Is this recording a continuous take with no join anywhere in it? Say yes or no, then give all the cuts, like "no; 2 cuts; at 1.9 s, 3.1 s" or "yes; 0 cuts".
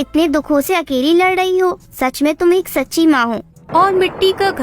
no; 1 cut; at 3.6 s